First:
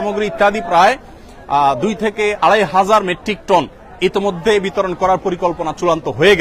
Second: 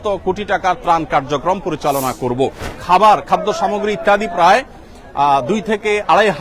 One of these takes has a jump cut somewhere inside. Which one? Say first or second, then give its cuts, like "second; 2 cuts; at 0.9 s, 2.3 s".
second; 1 cut; at 2.7 s